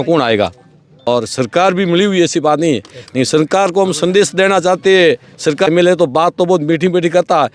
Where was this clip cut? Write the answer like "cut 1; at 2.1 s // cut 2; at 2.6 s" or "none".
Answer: cut 1; at 1.1 s // cut 2; at 5.7 s